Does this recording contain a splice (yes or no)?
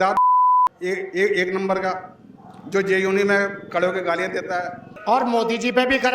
yes